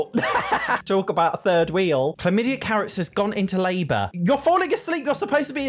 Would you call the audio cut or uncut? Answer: cut